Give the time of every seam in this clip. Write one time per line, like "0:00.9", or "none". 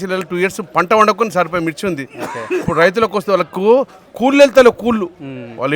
none